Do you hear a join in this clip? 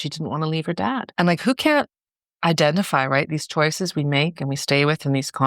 yes; 1 cut; at 1.1 s

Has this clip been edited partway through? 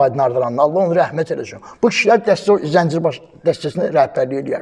no; 0 cuts

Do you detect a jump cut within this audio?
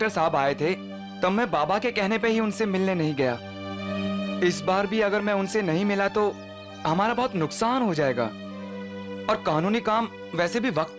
no; 0 cuts

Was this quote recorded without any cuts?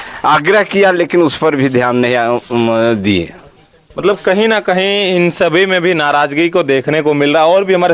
yes; 0 cuts

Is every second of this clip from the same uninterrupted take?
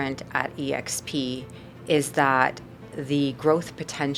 yes; 0 cuts

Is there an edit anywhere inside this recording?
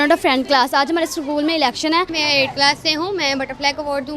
yes; 1 cut; at 2.1 s

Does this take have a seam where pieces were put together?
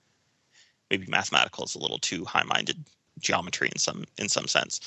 yes; 1 cut; at 3.1 s

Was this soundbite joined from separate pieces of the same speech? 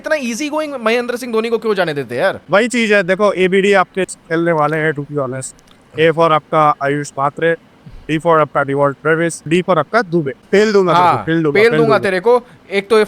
yes; 3 cuts; at 2.4 s, 9.5 s, 10.4 s

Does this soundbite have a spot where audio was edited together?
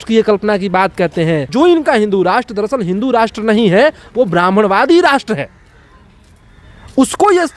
yes; 1 cut; at 1.5 s

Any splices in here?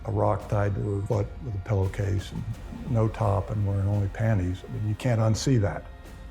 yes; 1 cut; at 1.0 s

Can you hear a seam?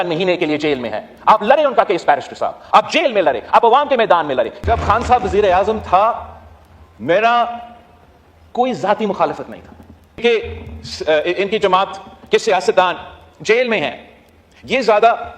yes; 2 cuts; at 4.6 s, 10.2 s

